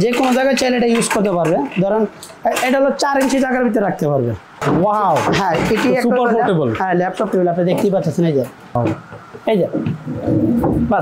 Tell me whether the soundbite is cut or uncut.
cut